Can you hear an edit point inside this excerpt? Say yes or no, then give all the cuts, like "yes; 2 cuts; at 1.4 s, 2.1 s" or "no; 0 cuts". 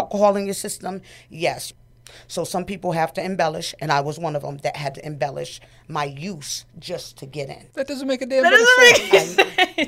yes; 3 cuts; at 1.7 s, 7.6 s, 8.5 s